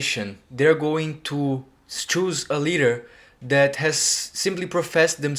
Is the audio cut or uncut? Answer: uncut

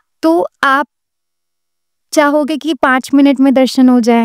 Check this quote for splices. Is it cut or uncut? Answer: uncut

